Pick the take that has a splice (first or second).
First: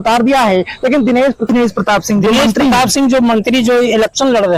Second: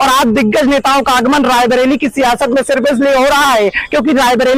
first